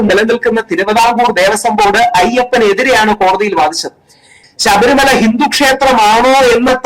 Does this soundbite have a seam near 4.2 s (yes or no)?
yes